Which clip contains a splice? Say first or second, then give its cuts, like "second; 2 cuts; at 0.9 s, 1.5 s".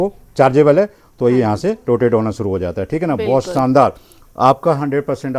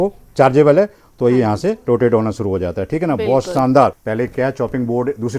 second; 1 cut; at 4.0 s